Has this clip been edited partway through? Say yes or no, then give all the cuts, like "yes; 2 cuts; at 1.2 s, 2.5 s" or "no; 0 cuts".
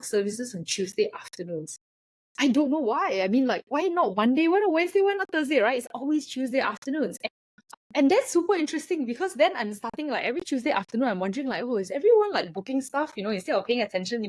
no; 0 cuts